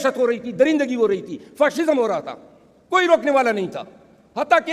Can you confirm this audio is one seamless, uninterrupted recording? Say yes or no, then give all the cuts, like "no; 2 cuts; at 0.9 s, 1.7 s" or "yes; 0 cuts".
yes; 0 cuts